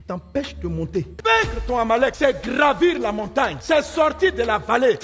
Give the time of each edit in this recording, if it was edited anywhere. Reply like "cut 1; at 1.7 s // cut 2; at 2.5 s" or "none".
cut 1; at 1.1 s